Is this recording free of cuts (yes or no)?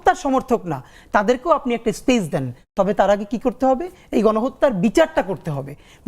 yes